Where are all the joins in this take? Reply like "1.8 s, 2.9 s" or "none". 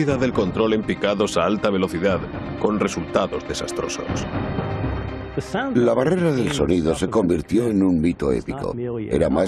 6.9 s